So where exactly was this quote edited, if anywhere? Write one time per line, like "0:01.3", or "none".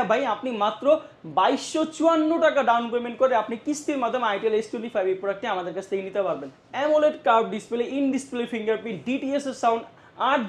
0:06.6